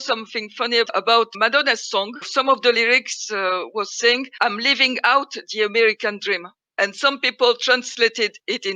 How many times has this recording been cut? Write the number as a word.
two